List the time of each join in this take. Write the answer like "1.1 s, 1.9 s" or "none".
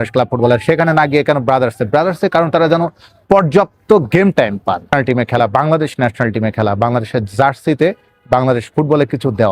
4.9 s